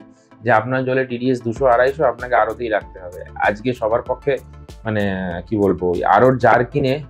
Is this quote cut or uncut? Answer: uncut